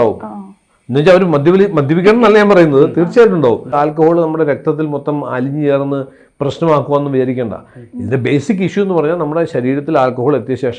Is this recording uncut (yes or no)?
no